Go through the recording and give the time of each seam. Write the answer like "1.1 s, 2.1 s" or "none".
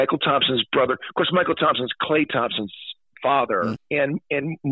3.8 s